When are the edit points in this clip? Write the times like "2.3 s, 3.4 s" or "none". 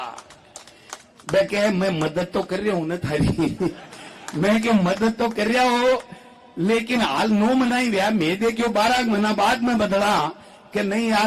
none